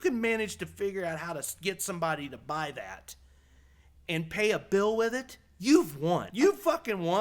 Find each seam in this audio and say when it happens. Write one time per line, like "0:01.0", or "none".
0:06.3

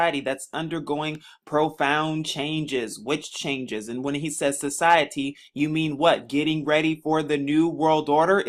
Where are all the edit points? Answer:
none

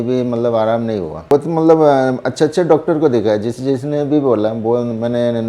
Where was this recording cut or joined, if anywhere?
0:01.3

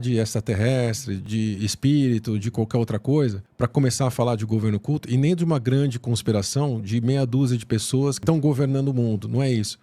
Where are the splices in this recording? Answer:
0:01.2
0:03.4
0:08.2

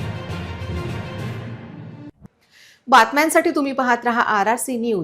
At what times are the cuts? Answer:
none

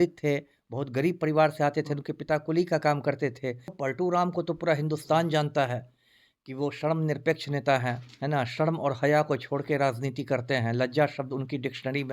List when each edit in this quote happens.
0:03.8

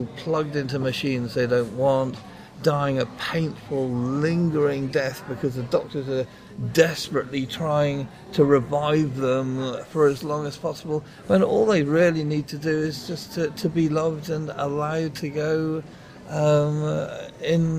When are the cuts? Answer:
none

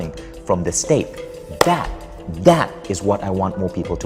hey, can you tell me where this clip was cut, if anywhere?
none

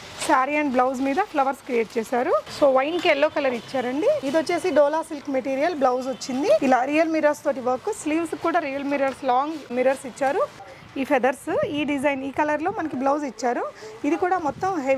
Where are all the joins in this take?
0:02.5
0:04.3
0:06.6
0:09.7
0:10.7

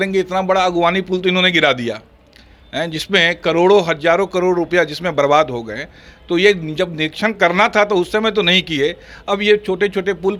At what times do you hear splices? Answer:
none

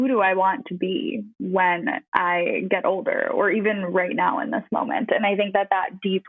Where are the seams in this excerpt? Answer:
0:01.3
0:02.0

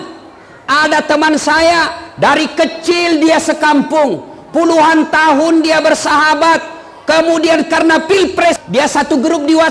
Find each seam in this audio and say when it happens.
0:08.6

